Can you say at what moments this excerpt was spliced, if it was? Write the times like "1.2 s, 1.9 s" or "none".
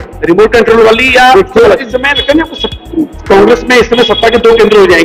1.9 s